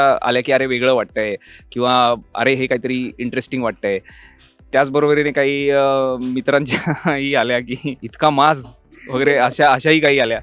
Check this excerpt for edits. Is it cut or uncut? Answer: cut